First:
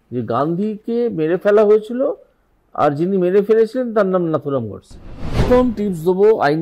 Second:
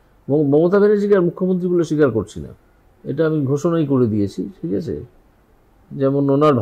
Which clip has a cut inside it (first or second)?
first